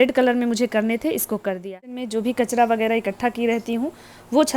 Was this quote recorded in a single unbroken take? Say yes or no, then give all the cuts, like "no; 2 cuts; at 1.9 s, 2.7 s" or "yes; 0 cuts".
no; 1 cut; at 2.1 s